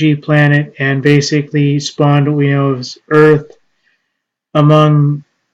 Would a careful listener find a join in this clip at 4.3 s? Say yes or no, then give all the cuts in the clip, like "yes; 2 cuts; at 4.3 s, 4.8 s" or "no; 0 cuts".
no; 1 cut; at 2.5 s